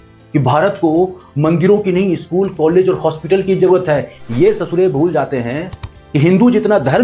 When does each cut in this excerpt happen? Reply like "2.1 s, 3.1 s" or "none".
none